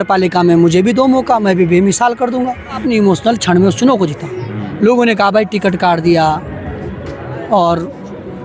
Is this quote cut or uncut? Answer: cut